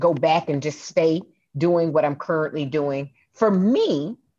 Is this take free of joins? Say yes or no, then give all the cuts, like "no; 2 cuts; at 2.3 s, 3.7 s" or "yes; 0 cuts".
yes; 0 cuts